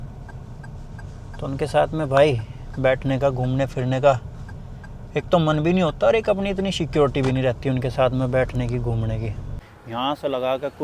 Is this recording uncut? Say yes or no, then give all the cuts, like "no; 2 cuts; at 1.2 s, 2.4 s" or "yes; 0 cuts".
no; 1 cut; at 9.5 s